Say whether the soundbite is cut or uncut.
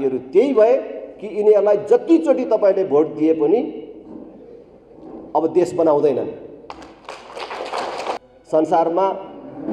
cut